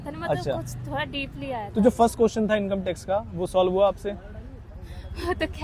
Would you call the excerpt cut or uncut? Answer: uncut